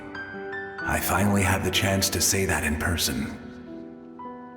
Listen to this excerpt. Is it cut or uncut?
cut